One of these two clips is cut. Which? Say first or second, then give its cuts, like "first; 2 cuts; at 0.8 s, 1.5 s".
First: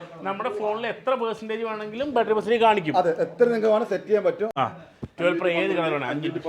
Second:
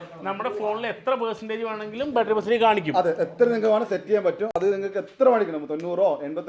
first; 1 cut; at 4.5 s